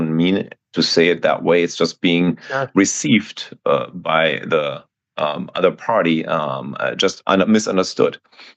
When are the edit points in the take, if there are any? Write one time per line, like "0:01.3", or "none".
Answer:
none